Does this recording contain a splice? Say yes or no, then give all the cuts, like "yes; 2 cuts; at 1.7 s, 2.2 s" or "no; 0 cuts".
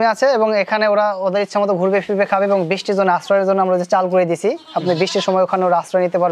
no; 0 cuts